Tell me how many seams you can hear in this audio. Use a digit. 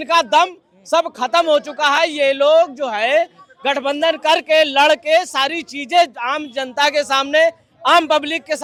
0